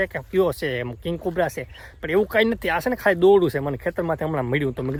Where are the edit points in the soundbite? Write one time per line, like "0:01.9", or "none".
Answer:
none